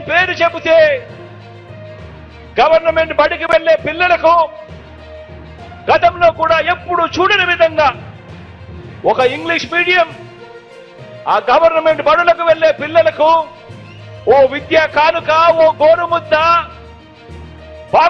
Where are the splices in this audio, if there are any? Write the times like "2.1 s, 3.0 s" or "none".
1.1 s, 2.5 s